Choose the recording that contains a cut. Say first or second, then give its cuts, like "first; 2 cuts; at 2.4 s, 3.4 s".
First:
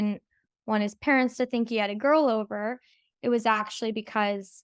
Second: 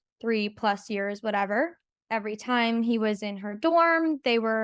second; 1 cut; at 1.9 s